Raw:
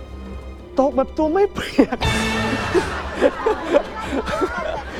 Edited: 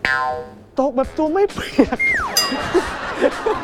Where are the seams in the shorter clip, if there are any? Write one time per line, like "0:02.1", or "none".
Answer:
none